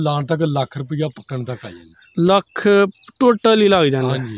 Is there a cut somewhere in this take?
no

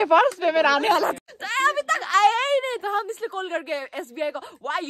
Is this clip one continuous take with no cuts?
no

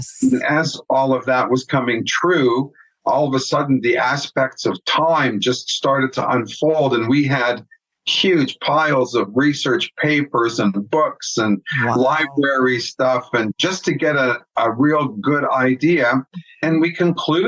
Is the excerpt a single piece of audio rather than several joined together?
yes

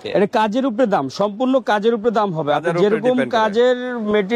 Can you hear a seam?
no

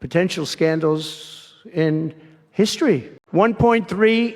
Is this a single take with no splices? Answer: no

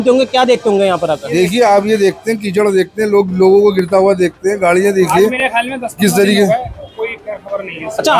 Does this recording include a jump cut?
no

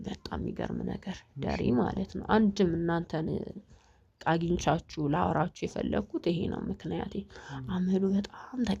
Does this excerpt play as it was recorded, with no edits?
yes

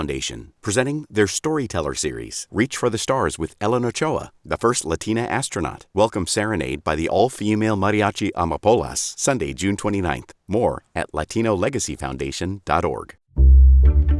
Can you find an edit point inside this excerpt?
yes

